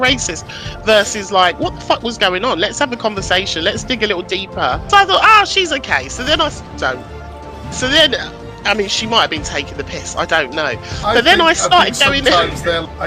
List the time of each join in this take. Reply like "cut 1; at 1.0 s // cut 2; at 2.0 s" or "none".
none